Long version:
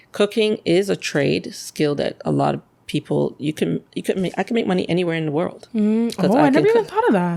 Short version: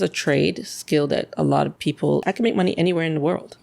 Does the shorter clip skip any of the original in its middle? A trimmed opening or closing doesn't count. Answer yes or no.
yes